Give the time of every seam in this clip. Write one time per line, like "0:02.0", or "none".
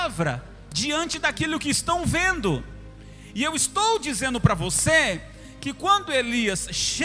none